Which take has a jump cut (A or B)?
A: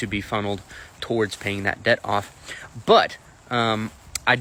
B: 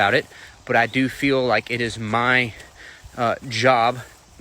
B